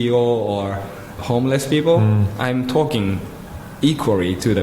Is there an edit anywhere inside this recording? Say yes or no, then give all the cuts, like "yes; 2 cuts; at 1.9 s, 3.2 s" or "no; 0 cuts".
yes; 1 cut; at 1.1 s